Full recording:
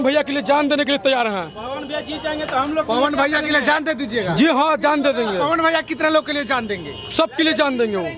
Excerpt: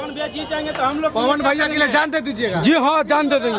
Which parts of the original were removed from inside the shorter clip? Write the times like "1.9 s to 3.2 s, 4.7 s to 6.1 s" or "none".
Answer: none